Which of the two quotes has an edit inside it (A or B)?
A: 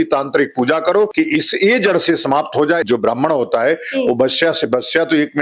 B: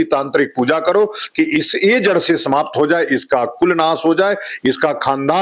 A